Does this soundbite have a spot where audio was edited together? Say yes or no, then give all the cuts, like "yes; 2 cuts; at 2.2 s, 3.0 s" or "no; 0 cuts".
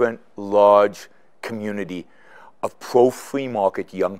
no; 0 cuts